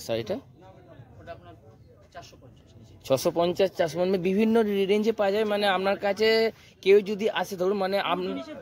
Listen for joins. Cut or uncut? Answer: uncut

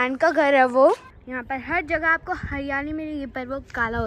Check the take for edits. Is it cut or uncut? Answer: cut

